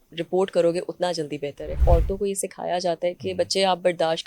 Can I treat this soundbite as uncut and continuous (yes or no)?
no